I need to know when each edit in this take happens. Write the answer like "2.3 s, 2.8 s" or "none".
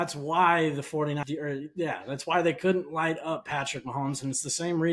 1.2 s